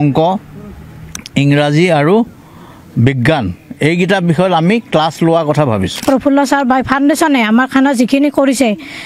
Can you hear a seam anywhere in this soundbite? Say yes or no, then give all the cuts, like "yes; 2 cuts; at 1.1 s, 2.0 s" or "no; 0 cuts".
yes; 1 cut; at 6.0 s